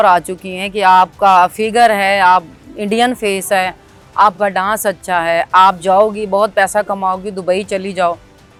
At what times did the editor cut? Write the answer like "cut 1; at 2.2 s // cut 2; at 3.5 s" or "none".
none